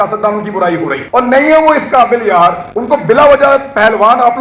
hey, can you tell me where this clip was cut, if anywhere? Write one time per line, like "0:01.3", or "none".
0:01.0
0:02.7